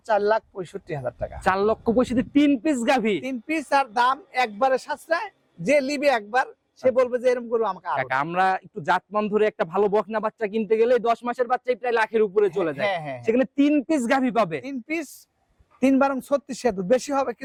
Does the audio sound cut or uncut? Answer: uncut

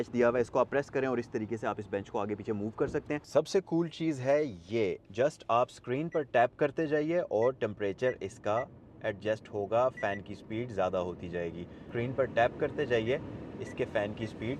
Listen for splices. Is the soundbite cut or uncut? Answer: cut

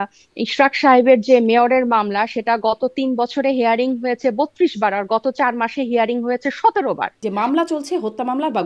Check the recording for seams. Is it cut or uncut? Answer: cut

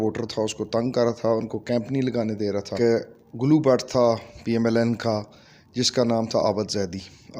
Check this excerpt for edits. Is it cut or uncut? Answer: cut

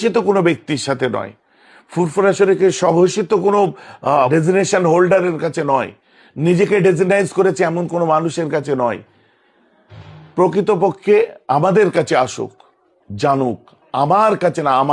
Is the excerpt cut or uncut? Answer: cut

